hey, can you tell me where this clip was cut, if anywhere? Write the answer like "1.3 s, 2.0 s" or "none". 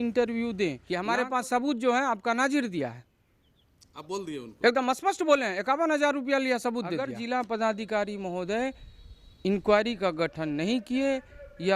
0.9 s, 7.2 s

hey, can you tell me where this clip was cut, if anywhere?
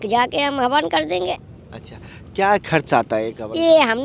none

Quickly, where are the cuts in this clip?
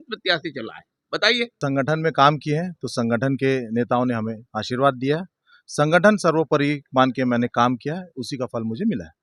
1.5 s

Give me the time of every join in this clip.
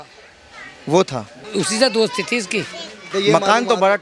1.4 s, 2.9 s

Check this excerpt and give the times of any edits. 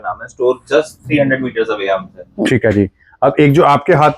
none

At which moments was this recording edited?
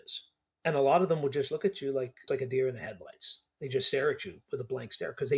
2.3 s

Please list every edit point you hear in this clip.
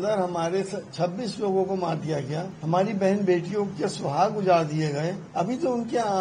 2.5 s, 5.2 s

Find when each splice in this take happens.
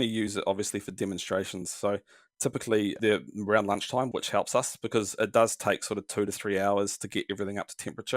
4.1 s

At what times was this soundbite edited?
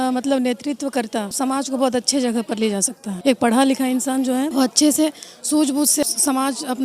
1.3 s, 3.1 s, 4.5 s, 6.0 s

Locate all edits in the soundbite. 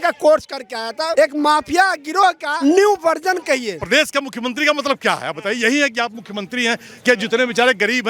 1.1 s, 2.5 s, 3.8 s

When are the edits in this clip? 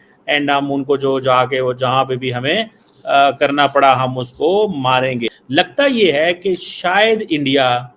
5.2 s

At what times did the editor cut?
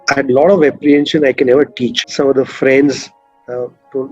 2.0 s

